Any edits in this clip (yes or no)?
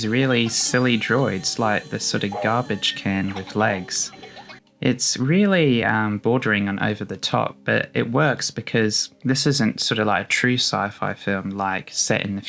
no